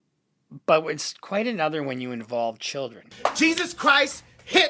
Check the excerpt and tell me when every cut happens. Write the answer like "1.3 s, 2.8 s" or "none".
3.1 s